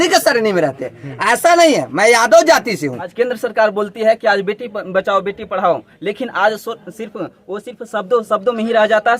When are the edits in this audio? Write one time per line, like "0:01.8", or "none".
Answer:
0:03.0